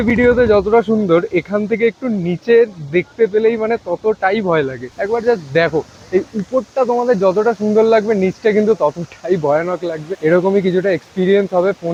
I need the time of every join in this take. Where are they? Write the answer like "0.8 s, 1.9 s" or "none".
none